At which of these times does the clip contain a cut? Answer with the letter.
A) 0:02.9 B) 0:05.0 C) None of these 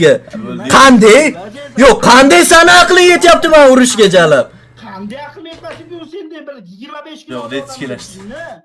C